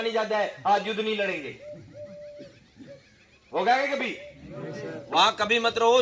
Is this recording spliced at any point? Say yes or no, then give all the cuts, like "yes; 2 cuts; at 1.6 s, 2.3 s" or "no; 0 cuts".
yes; 1 cut; at 4.9 s